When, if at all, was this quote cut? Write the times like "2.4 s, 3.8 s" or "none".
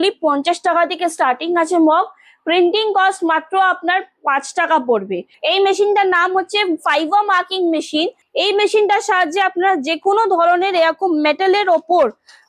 5.3 s, 8.2 s